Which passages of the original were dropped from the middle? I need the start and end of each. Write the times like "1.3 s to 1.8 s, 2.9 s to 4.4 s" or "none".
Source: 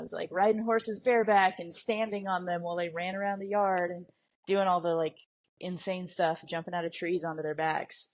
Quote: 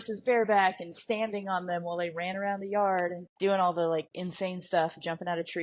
4.0 s to 4.3 s, 5.3 s to 5.7 s